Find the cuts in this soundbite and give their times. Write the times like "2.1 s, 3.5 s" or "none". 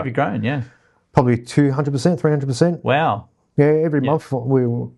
none